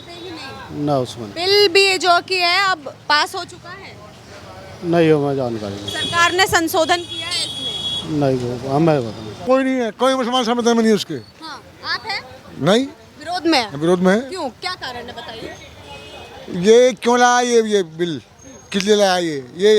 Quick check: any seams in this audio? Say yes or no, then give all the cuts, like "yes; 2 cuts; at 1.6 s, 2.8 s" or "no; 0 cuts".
yes; 1 cut; at 9.5 s